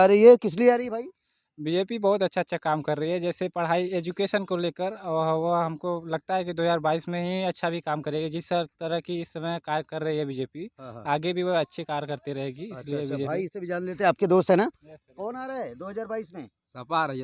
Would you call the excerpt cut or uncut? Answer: uncut